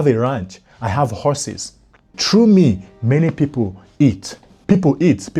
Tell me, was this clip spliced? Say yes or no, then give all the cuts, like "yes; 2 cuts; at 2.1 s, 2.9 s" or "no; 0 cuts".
yes; 2 cuts; at 2.2 s, 4.5 s